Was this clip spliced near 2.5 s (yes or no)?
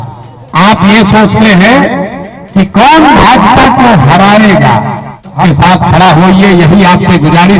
no